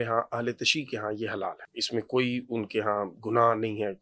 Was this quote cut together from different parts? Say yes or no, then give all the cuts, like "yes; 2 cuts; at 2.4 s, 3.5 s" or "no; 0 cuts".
yes; 1 cut; at 1.7 s